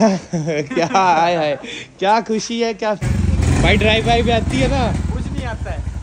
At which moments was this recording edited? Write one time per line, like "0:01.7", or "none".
0:03.0